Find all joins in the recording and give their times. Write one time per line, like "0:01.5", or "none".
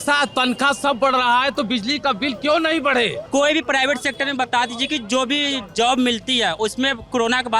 0:03.2